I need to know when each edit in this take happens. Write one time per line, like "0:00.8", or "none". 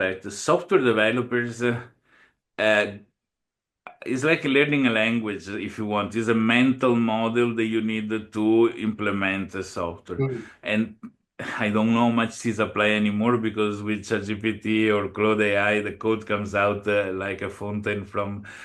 none

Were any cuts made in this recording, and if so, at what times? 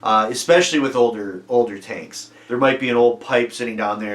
0:02.4

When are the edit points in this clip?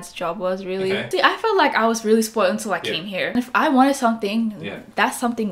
0:01.1
0:03.4

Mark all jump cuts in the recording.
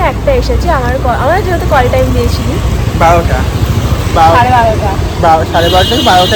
none

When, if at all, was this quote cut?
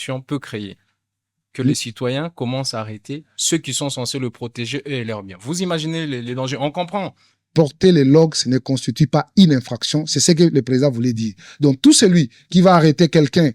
0:07.4

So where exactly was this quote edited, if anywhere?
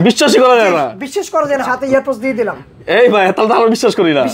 0:01.7

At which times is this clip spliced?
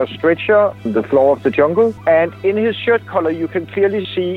0:00.8
0:02.0

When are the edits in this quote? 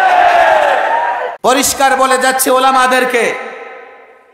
0:01.3

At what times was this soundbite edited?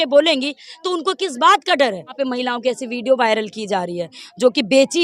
0:02.1

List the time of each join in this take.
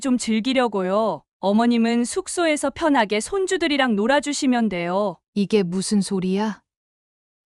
0:05.2

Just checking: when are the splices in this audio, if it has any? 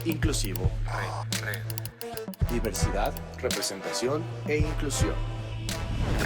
none

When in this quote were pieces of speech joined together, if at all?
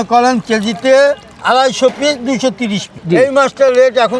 0:03.0

